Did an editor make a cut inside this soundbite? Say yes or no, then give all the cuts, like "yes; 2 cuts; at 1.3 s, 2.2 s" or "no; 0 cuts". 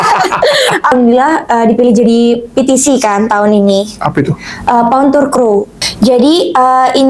yes; 2 cuts; at 0.9 s, 5.8 s